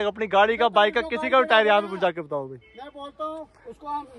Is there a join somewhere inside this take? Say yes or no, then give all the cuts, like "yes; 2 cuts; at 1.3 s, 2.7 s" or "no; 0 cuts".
no; 0 cuts